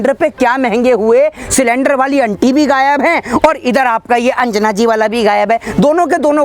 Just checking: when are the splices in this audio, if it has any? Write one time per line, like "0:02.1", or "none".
none